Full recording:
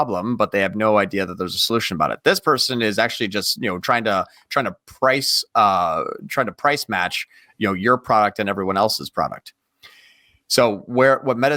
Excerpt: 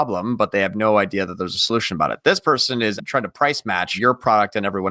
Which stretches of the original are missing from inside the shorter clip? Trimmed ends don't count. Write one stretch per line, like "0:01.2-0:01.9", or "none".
0:02.9-0:06.2
0:07.2-0:07.8

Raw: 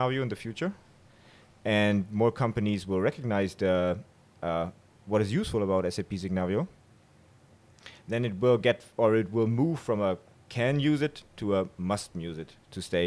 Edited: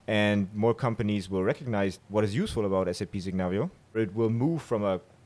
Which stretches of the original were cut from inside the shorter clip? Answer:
0:03.5-0:04.9
0:06.9-0:09.1

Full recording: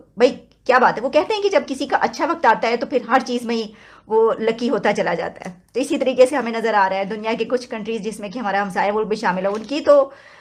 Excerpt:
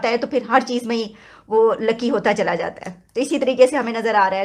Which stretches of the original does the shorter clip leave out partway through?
none

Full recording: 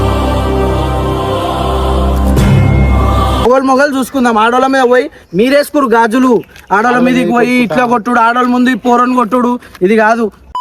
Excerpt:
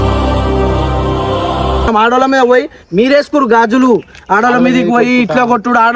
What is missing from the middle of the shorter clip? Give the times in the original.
0:01.9-0:04.3

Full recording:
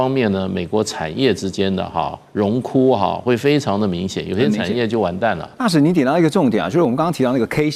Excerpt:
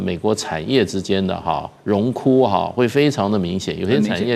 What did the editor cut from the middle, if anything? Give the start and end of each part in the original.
none

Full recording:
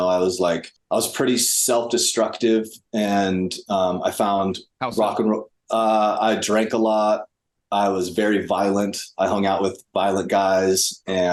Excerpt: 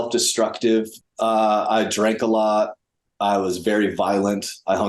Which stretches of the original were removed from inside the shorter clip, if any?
0:02.8-0:05.5

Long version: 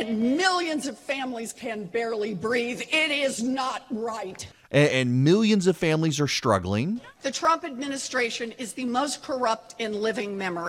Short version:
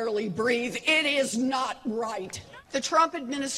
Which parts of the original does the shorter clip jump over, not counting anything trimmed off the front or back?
0:04.6-0:07.1

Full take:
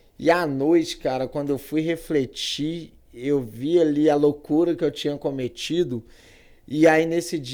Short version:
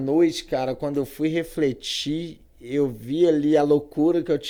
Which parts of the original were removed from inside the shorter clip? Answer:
none

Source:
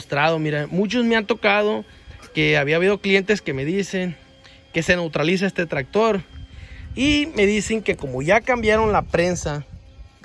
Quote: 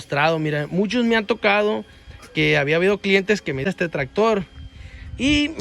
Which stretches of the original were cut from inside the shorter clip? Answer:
0:03.6-0:05.4

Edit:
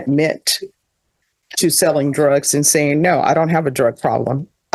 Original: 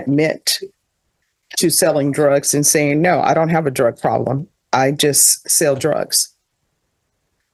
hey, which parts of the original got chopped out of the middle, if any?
none

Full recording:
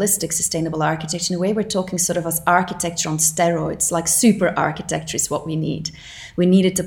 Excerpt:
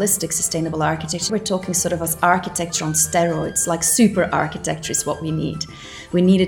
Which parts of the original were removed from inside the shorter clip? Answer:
0:01.3-0:01.5

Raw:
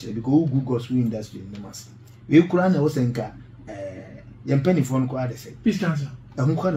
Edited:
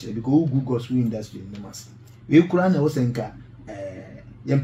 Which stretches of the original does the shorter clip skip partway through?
none

